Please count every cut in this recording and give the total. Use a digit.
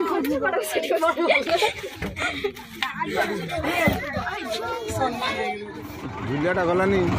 1